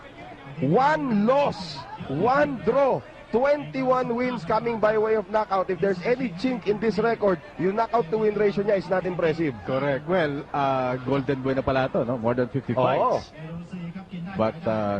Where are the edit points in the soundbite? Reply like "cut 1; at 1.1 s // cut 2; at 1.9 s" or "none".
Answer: cut 1; at 4.2 s